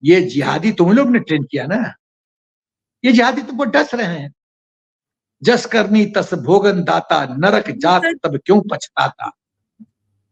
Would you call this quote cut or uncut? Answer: uncut